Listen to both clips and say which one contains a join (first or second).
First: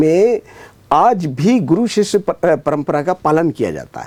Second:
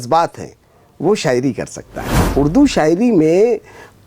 second